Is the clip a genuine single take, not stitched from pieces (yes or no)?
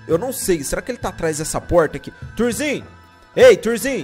yes